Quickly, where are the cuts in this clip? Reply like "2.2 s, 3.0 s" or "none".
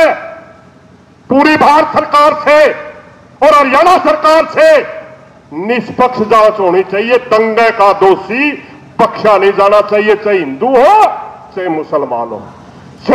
none